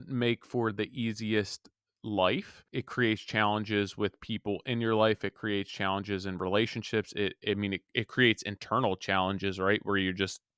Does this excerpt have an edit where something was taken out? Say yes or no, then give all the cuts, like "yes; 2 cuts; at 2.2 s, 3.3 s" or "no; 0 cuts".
yes; 1 cut; at 2.6 s